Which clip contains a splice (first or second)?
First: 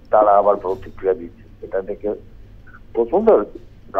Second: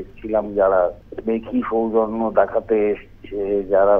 second